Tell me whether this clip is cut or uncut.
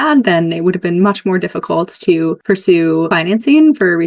cut